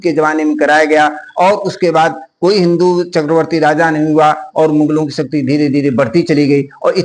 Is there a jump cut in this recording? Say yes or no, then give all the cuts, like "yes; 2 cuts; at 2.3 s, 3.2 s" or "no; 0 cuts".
no; 0 cuts